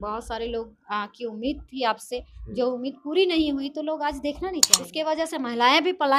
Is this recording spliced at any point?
yes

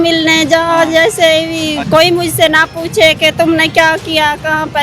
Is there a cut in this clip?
yes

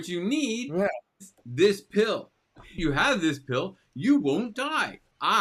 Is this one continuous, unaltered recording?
yes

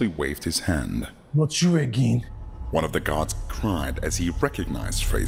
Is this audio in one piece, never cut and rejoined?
yes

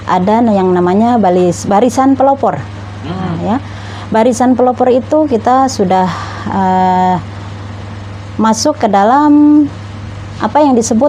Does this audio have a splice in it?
no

